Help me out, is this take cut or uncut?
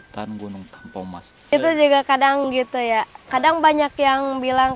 cut